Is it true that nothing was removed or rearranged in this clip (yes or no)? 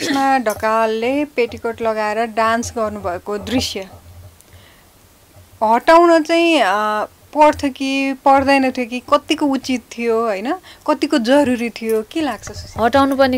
yes